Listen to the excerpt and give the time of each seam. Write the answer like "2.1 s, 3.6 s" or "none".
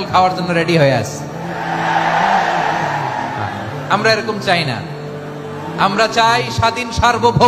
none